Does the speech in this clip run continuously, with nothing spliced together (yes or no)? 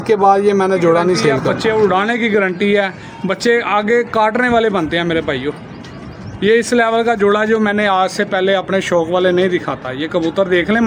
no